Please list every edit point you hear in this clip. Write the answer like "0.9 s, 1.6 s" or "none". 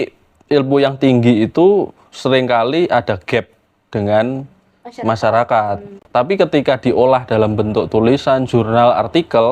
6.0 s